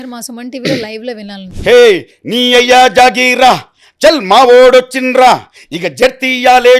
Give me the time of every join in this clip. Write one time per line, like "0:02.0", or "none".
0:01.4